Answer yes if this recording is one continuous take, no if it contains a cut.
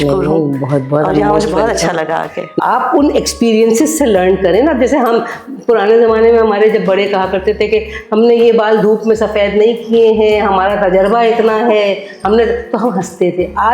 no